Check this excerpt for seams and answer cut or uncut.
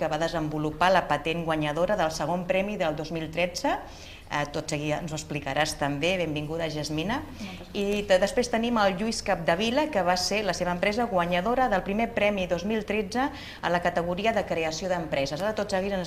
cut